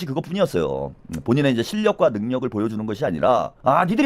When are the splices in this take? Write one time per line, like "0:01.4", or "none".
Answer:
none